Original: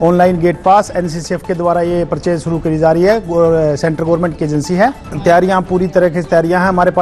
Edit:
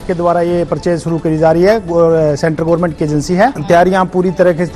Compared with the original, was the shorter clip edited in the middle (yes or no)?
yes